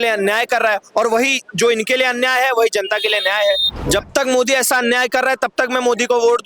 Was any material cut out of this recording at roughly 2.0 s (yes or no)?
no